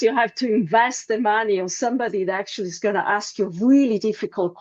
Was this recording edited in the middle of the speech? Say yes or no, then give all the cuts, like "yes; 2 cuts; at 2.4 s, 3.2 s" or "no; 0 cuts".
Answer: no; 0 cuts